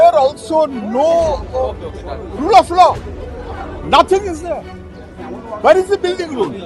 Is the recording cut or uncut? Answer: uncut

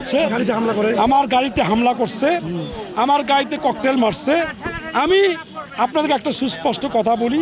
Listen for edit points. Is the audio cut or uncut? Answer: uncut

